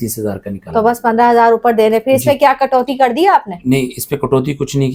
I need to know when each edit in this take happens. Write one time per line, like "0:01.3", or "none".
none